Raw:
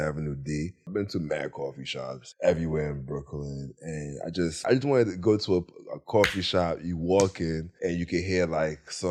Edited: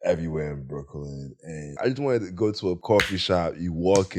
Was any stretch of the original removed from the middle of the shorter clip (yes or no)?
yes